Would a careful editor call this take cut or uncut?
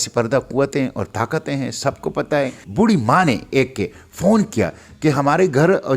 cut